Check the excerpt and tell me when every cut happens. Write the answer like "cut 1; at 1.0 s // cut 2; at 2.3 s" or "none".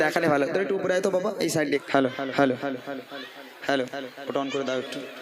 cut 1; at 1.8 s

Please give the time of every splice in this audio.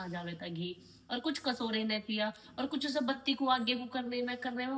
none

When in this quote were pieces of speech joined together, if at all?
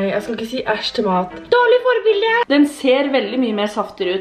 cut 1; at 2.4 s

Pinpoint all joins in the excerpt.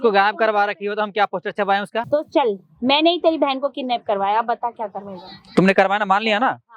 cut 1; at 2.1 s

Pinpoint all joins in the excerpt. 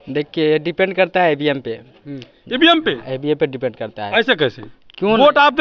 none

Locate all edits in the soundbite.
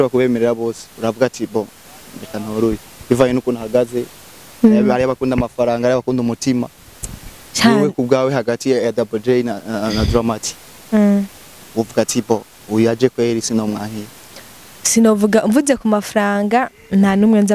none

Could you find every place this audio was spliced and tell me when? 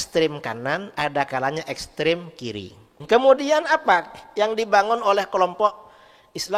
cut 1; at 3.0 s

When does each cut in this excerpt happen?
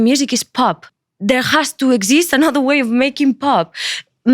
cut 1; at 0.9 s

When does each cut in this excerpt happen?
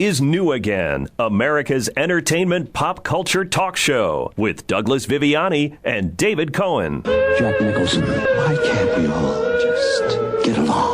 cut 1; at 4.3 s // cut 2; at 7.0 s

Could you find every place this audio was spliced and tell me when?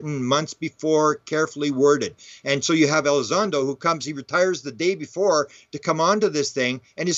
none

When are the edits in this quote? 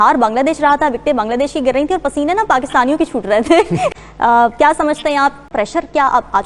cut 1; at 3.9 s

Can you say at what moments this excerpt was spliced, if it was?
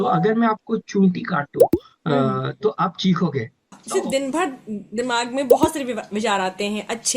cut 1; at 3.8 s

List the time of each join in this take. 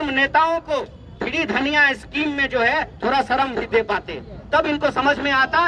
none

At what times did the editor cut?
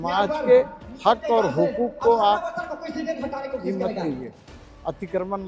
none

